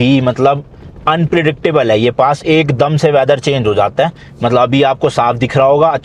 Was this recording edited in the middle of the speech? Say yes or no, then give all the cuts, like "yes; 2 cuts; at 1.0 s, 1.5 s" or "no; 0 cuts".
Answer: no; 0 cuts